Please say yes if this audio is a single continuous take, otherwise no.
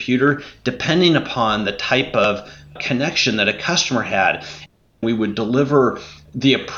no